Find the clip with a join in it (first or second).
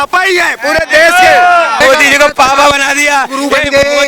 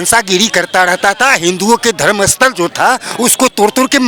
first